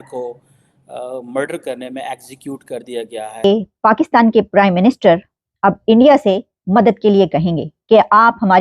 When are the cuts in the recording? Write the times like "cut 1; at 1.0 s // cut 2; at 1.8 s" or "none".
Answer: cut 1; at 3.4 s